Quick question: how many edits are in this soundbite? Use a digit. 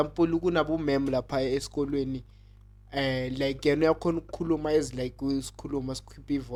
0